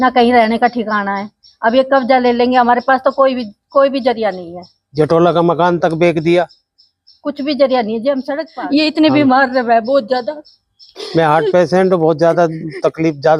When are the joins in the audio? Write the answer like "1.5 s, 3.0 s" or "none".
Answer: 8.4 s